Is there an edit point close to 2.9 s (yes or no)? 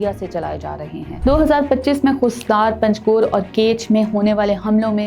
no